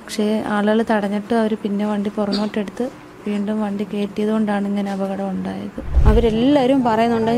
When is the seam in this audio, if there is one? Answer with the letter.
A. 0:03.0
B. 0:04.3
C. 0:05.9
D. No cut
C